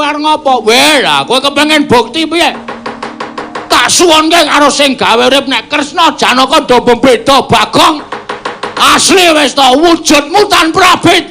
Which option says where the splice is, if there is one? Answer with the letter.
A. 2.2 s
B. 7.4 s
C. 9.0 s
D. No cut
C